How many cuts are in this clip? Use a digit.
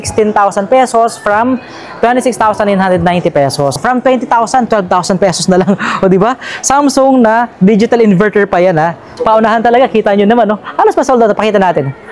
2